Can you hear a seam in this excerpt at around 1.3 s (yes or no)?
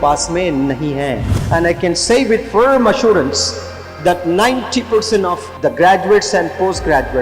yes